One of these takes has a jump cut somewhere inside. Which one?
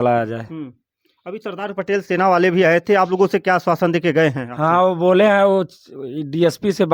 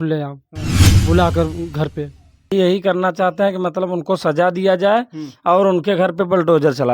second; 1 cut; at 2.5 s

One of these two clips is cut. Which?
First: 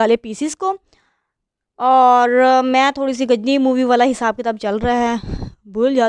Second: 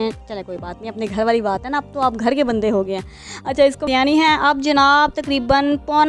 second; 1 cut; at 3.8 s

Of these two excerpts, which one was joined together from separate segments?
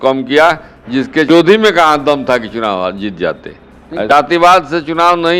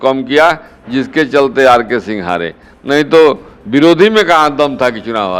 first; 2 cuts; at 1.3 s, 4.1 s

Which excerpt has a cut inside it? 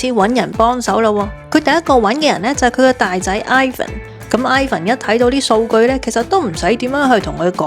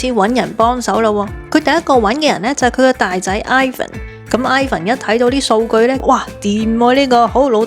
second; 1 cut; at 6.0 s

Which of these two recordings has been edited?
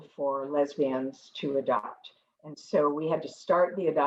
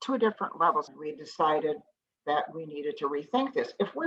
second; 1 cut; at 0.9 s

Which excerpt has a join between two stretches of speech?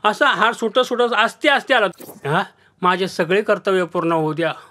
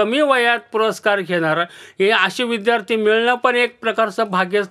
first; 1 cut; at 1.9 s

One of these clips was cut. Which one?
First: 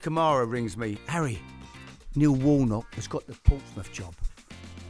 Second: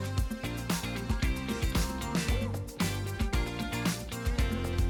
first; 1 cut; at 1.0 s

